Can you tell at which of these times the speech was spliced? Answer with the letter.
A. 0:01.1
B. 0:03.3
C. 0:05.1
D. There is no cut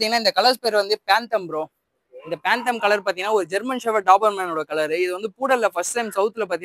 D